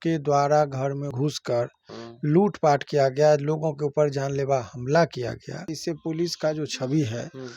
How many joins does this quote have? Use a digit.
2